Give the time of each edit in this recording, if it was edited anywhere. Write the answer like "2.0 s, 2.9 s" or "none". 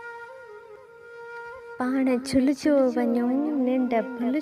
1.7 s